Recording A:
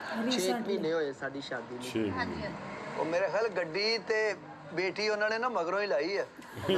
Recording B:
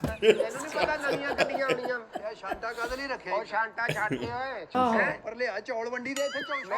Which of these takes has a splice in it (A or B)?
B